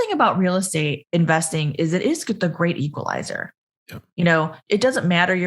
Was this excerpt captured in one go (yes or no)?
no